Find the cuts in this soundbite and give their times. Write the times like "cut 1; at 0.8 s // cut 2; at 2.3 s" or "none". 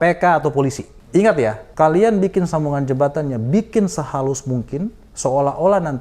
cut 1; at 0.9 s // cut 2; at 1.6 s // cut 3; at 5.0 s

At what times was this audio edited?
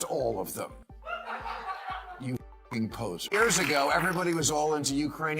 cut 1; at 3.3 s

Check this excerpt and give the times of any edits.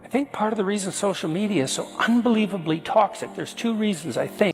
none

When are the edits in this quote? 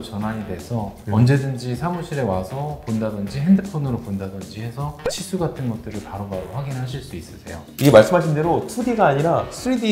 cut 1; at 7.6 s

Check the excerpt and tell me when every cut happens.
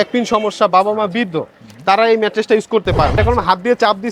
cut 1; at 3.1 s

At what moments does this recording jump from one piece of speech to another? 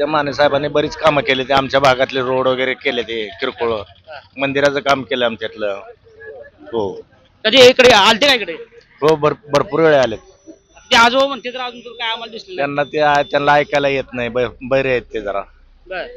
none

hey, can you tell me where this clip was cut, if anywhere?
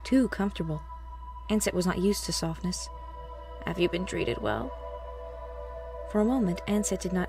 none

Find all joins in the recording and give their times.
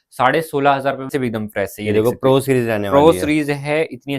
cut 1; at 1.1 s

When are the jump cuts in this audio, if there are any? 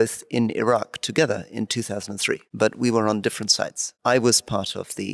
cut 1; at 2.5 s // cut 2; at 3.9 s

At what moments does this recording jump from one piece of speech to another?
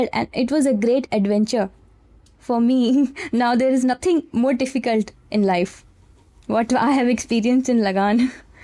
none

